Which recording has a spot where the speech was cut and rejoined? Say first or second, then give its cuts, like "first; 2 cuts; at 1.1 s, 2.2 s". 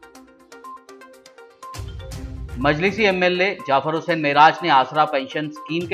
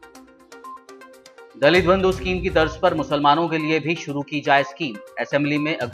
first; 1 cut; at 0.9 s